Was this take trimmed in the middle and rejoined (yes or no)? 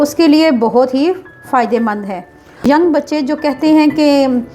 yes